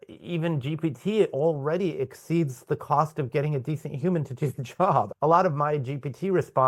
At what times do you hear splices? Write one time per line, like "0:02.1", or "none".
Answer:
none

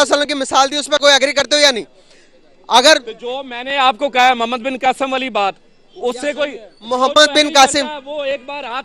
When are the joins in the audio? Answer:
none

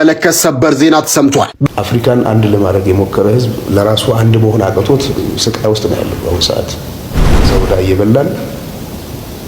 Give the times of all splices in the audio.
0:01.7

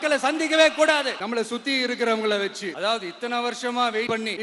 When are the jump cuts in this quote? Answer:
0:01.2

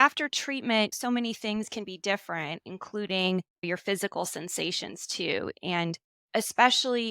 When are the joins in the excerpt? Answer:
0:00.9

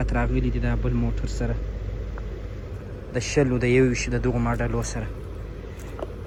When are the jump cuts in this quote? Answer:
none

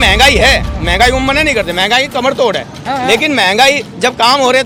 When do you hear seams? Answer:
none

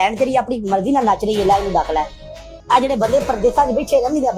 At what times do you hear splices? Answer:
none

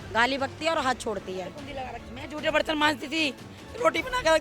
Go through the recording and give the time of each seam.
0:02.1

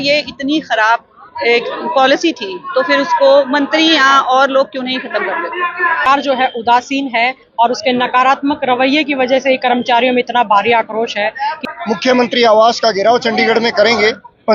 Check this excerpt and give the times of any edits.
0:06.1
0:11.6

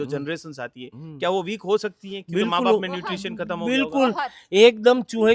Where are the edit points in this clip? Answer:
none

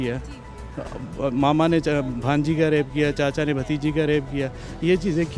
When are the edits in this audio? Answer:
none

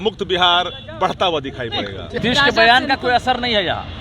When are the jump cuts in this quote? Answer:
0:02.2

